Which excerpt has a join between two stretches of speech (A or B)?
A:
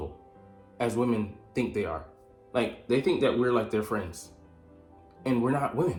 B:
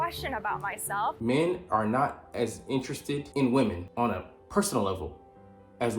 B